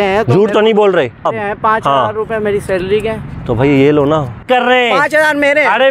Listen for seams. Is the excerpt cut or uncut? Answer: cut